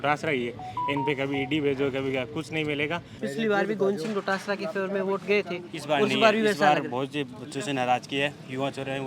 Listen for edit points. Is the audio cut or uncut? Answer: cut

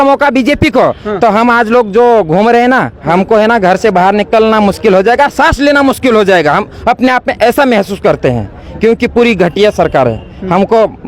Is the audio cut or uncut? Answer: uncut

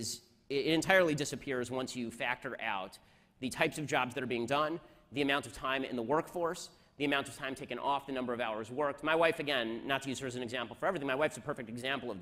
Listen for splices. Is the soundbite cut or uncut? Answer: uncut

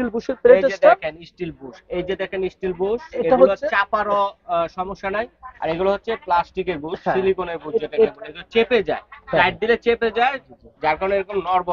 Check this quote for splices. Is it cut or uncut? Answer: uncut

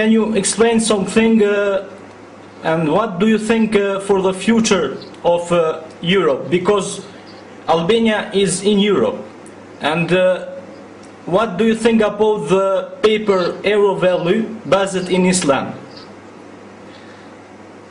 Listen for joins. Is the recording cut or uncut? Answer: uncut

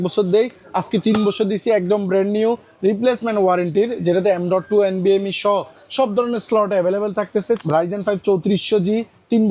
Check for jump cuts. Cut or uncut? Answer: cut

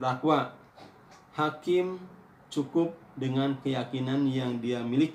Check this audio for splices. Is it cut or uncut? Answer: uncut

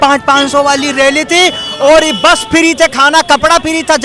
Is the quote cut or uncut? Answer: uncut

